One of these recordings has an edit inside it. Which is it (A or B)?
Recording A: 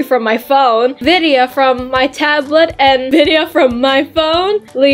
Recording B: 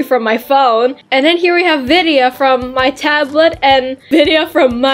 A